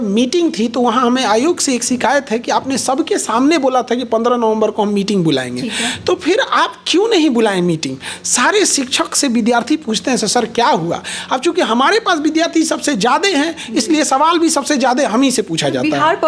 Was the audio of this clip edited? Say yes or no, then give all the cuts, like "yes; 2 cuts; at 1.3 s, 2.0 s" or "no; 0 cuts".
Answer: no; 0 cuts